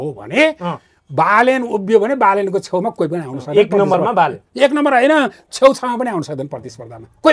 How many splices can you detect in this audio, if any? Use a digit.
0